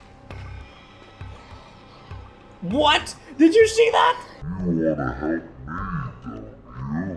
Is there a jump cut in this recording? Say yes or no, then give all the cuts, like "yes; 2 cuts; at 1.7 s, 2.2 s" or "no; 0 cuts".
no; 0 cuts